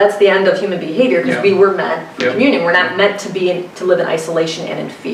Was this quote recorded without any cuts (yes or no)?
yes